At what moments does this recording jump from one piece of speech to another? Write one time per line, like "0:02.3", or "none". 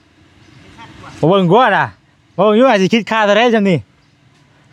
none